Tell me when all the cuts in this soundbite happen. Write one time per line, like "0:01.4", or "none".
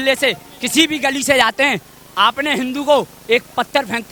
none